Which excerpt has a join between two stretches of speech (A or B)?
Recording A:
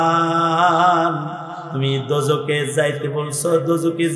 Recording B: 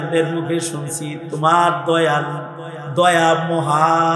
A